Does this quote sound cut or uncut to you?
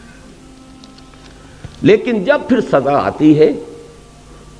cut